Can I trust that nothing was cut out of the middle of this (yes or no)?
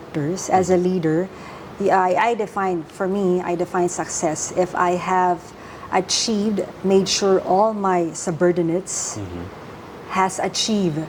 yes